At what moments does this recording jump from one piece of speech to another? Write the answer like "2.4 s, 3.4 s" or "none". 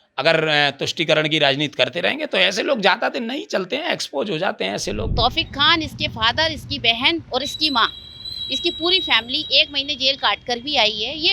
5.1 s